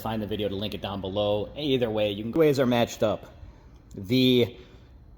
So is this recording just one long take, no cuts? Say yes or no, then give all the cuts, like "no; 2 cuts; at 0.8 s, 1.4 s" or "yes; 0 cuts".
no; 1 cut; at 2.4 s